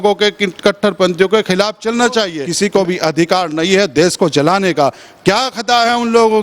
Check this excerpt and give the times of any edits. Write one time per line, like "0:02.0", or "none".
0:02.4